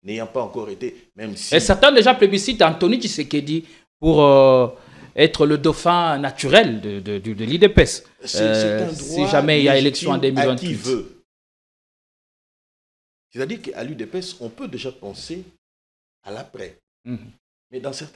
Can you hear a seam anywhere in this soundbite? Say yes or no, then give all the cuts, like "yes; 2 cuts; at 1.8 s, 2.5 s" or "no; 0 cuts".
no; 0 cuts